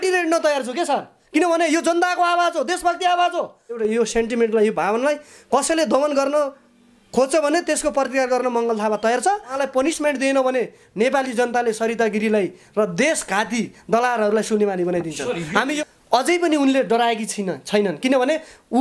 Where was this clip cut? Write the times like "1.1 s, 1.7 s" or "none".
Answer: 3.8 s, 9.5 s, 15.7 s